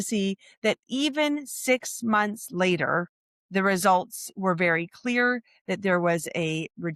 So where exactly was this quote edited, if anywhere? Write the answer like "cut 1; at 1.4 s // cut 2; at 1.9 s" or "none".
none